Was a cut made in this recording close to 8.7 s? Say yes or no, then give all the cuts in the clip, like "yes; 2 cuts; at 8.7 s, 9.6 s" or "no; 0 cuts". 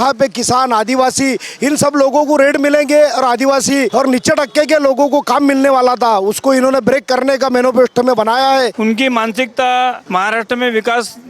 yes; 3 cuts; at 3.9 s, 8.7 s, 10.0 s